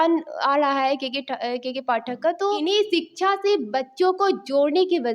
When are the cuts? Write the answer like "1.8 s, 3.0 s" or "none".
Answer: 2.6 s